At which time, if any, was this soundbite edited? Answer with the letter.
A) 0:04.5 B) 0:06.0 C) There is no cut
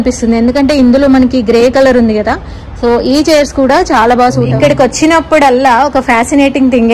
A